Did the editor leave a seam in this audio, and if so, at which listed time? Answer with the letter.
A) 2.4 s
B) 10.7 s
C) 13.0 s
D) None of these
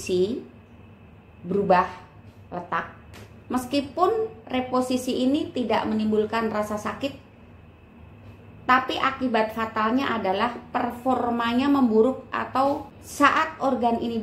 C